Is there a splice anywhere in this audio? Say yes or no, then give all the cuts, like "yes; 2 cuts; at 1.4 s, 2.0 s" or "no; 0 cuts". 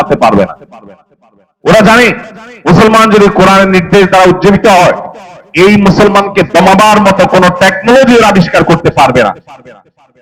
no; 0 cuts